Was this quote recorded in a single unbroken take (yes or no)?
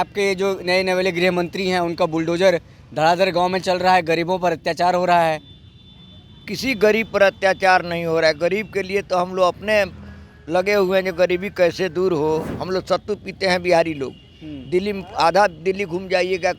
no